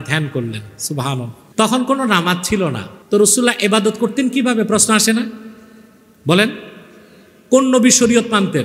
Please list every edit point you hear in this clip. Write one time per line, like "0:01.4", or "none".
0:01.4
0:02.9